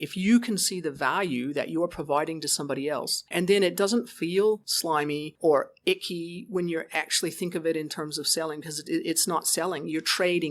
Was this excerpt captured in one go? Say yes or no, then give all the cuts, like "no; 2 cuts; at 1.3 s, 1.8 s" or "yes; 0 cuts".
no; 2 cuts; at 3.3 s, 4.9 s